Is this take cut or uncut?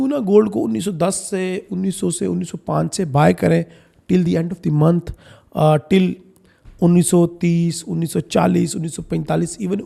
uncut